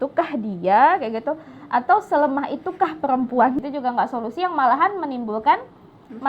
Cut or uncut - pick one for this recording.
cut